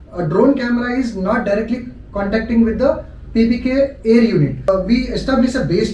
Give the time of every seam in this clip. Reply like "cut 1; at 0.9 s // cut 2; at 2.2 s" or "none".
cut 1; at 4.7 s